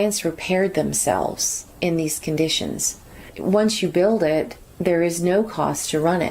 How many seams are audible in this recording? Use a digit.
1